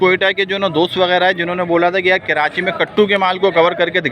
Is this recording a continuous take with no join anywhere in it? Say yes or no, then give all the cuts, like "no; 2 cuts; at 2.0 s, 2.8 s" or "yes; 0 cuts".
yes; 0 cuts